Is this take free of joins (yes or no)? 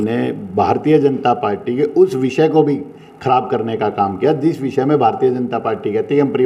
yes